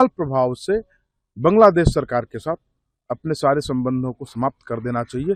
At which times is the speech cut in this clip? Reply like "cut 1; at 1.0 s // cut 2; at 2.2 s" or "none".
none